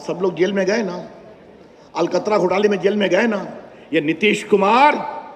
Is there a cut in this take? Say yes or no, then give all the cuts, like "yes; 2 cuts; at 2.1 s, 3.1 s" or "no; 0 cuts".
no; 0 cuts